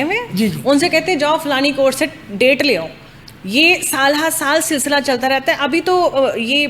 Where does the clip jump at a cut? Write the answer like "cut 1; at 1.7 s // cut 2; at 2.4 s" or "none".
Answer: none